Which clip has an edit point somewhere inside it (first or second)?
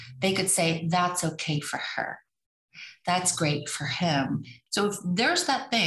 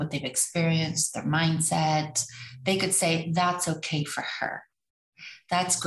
first